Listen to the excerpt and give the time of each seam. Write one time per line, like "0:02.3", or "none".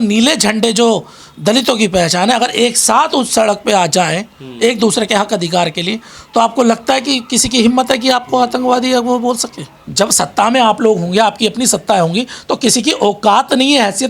0:09.8